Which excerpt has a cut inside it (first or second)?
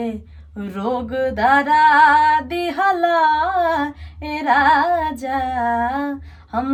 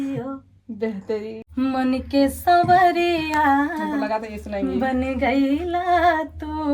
second